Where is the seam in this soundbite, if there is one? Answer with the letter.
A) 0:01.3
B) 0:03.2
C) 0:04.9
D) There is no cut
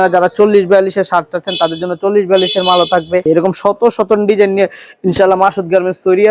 B